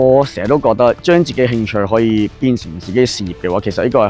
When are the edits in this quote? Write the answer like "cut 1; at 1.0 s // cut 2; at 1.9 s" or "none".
cut 1; at 1.0 s